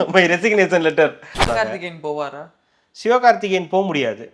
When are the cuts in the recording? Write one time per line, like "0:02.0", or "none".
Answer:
0:01.4